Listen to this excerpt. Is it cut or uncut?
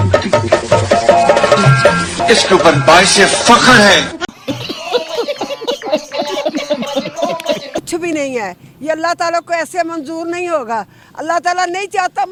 uncut